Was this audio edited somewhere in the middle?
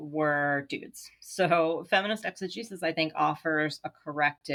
no; 0 cuts

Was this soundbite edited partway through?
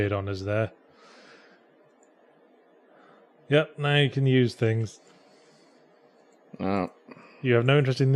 yes; 1 cut; at 5.4 s

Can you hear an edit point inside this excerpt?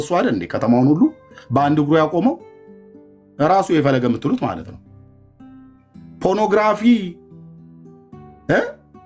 no; 0 cuts

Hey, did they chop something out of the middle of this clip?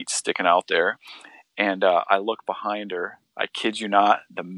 no; 0 cuts

